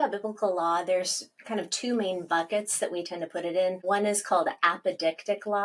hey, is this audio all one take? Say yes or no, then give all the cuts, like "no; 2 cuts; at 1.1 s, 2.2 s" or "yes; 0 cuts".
yes; 0 cuts